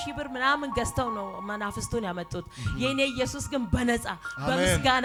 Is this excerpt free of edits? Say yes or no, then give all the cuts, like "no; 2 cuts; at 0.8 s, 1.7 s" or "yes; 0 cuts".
yes; 0 cuts